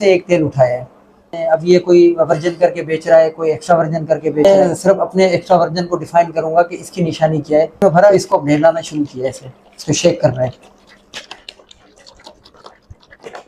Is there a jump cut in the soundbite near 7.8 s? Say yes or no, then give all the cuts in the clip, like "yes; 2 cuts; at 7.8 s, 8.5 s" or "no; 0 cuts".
yes; 4 cuts; at 1.3 s, 4.5 s, 7.8 s, 11.0 s